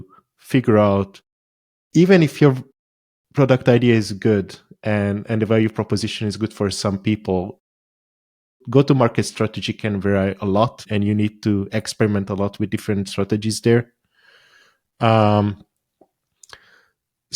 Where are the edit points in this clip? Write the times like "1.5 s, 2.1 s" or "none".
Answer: 10.8 s